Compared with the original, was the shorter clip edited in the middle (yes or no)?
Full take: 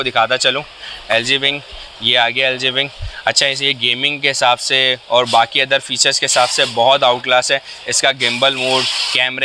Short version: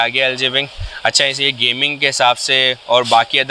no